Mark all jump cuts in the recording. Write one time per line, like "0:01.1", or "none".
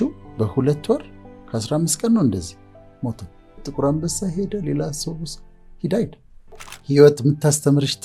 0:03.7
0:06.8